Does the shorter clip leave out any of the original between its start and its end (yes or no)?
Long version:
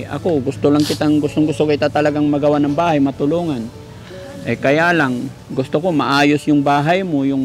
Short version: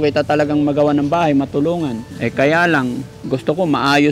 yes